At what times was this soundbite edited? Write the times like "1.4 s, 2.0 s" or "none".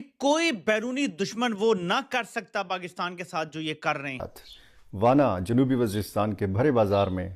4.4 s